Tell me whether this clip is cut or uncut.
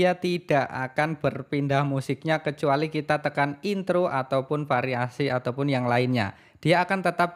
uncut